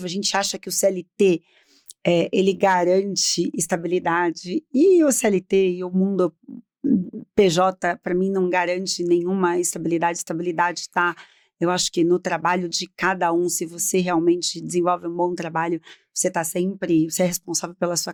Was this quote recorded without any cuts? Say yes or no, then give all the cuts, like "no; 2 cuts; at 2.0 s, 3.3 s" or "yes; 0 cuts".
yes; 0 cuts